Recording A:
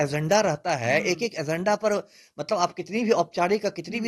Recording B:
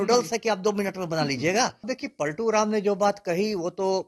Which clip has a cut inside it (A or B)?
B